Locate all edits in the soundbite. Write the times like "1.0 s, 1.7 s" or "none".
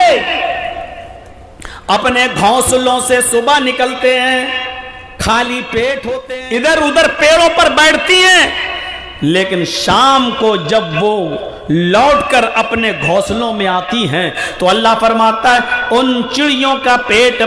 6.2 s